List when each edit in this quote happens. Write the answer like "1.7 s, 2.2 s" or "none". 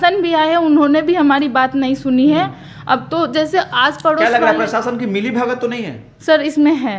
none